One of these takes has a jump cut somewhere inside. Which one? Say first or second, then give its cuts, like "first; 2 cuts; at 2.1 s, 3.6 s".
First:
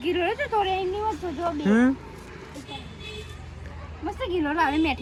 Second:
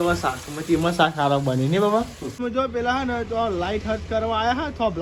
second; 1 cut; at 2.4 s